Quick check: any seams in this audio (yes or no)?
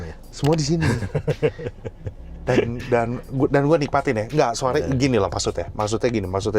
no